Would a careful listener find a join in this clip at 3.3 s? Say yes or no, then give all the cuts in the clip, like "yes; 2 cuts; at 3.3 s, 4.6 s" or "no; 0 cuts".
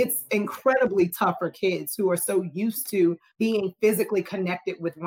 yes; 1 cut; at 3.3 s